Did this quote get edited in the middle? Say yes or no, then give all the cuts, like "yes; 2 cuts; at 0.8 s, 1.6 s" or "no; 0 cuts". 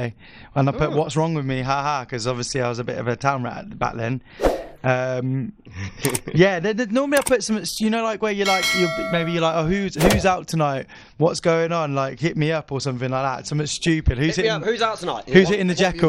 no; 0 cuts